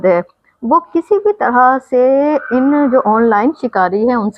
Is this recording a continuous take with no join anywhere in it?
yes; 0 cuts

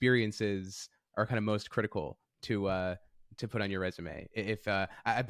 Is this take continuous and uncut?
yes; 0 cuts

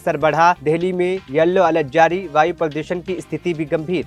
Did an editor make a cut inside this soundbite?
no; 0 cuts

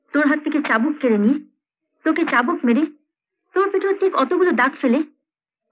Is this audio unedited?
yes; 0 cuts

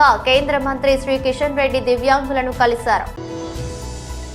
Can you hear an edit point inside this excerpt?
no; 0 cuts

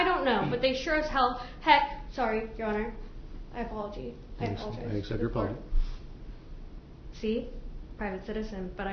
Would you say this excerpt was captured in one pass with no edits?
yes; 0 cuts

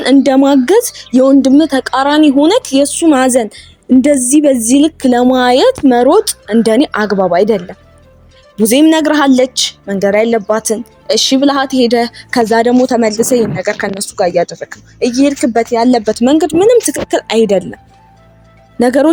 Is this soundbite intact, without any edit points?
yes; 0 cuts

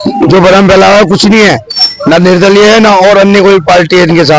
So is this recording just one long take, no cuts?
yes; 0 cuts

